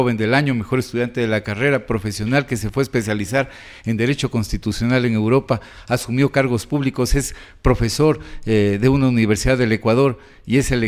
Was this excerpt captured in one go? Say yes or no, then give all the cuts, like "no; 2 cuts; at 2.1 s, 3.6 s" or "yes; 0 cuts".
yes; 0 cuts